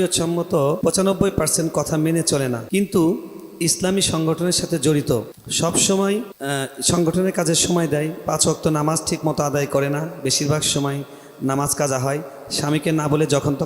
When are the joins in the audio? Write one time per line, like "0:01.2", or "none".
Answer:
0:00.8
0:02.6
0:05.4
0:06.3